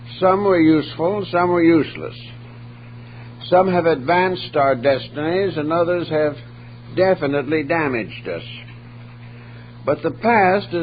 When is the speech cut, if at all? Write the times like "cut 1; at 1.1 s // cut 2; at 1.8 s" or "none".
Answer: cut 1; at 3.7 s